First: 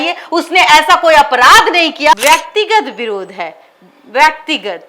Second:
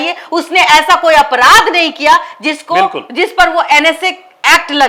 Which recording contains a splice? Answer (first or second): first